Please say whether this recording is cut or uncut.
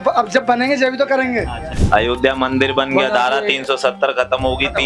cut